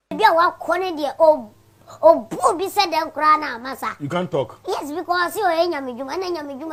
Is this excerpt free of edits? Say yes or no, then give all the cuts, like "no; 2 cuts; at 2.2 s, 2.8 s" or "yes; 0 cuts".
yes; 0 cuts